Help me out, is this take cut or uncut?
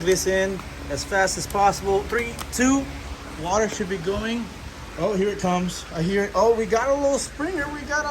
uncut